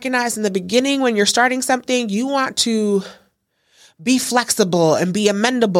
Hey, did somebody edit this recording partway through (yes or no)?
no